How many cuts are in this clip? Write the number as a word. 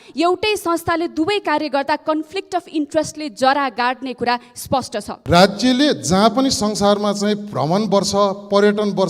one